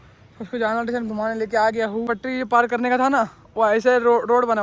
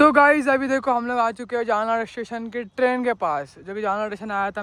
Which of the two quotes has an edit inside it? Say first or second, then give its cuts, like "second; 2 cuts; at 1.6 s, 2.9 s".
first; 1 cut; at 2.1 s